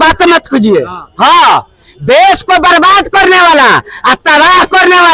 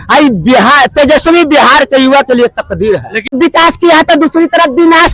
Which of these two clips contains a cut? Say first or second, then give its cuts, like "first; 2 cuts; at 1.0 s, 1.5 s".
second; 1 cut; at 3.3 s